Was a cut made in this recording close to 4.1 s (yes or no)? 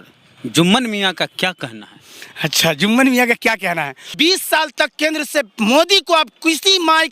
yes